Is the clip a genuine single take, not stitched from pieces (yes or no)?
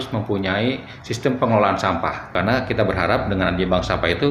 no